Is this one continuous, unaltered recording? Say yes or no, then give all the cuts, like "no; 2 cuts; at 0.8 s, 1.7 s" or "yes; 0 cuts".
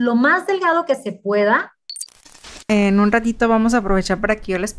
no; 1 cut; at 2.4 s